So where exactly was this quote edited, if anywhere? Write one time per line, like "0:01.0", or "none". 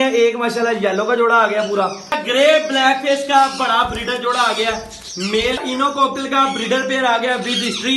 0:02.1
0:05.6